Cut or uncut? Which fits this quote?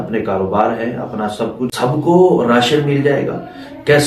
cut